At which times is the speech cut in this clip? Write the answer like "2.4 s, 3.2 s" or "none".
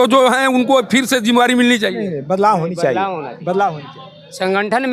none